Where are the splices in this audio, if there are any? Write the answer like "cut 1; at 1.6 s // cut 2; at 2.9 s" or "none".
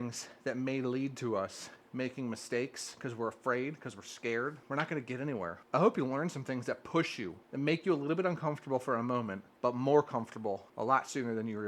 cut 1; at 4.6 s // cut 2; at 5.6 s // cut 3; at 7.4 s // cut 4; at 9.4 s // cut 5; at 10.7 s